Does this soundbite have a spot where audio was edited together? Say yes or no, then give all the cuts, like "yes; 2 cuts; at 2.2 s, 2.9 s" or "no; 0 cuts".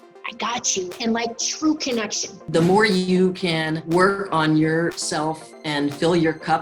yes; 3 cuts; at 2.3 s, 3.8 s, 5.0 s